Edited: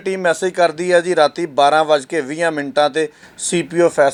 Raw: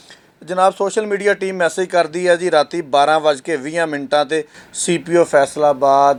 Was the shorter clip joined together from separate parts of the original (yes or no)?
no